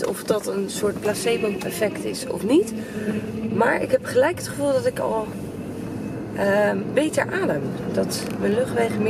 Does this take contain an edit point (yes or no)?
no